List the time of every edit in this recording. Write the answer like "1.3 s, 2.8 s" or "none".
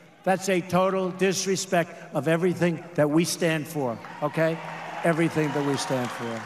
4.8 s

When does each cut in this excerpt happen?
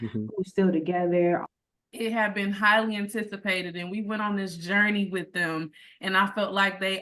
1.4 s

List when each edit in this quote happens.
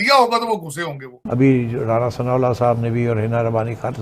1.2 s

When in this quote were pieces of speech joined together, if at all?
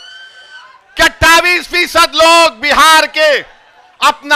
none

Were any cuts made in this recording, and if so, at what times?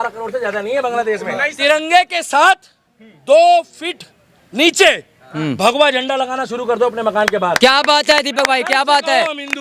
1.4 s

